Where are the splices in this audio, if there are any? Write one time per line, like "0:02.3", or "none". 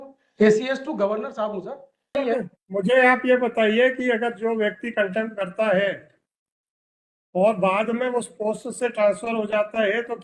0:02.2

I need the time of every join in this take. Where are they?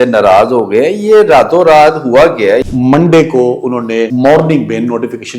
0:02.7
0:04.1

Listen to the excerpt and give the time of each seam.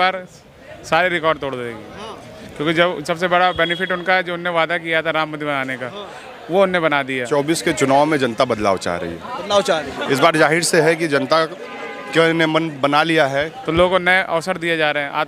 0:07.3
0:13.6

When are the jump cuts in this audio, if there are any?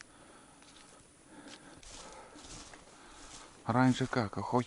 0:01.8

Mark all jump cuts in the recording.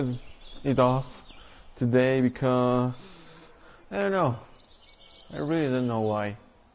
0:05.0

